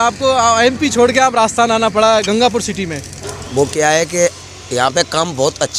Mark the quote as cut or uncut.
uncut